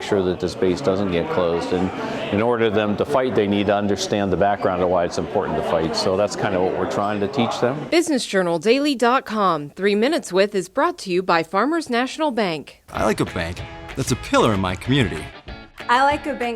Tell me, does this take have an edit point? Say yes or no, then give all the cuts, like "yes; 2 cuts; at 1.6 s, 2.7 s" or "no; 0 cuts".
yes; 1 cut; at 7.8 s